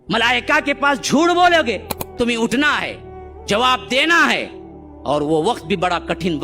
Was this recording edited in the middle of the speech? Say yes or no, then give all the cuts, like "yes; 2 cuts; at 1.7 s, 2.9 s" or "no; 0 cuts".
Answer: yes; 1 cut; at 2.1 s